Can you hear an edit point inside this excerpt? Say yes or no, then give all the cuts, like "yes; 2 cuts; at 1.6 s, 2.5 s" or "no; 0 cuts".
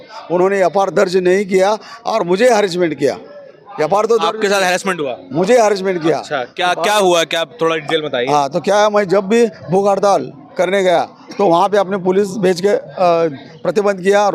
no; 0 cuts